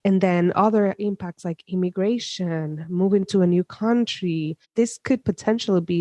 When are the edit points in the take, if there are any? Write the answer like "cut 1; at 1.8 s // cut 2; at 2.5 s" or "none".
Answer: cut 1; at 4.7 s

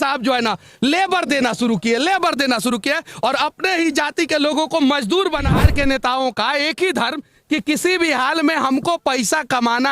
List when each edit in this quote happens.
cut 1; at 5.6 s

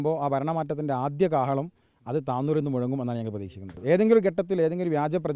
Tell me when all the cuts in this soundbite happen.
cut 1; at 3.7 s

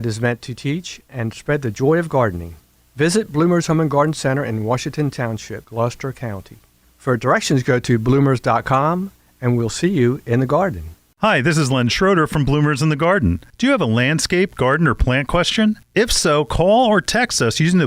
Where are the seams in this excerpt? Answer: cut 1; at 11.0 s

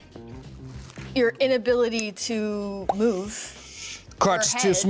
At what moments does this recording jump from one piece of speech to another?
none

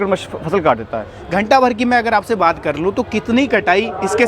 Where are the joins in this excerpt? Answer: cut 1; at 1.1 s

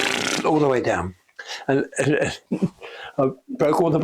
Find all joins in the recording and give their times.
cut 1; at 2.4 s

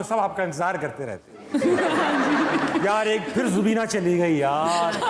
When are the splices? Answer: none

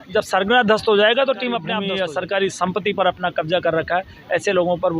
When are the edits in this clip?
cut 1; at 1.7 s

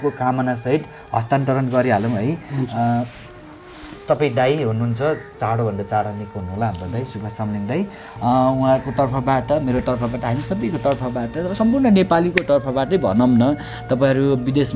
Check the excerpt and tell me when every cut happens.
cut 1; at 8.0 s

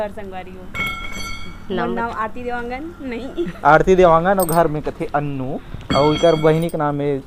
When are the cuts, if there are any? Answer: none

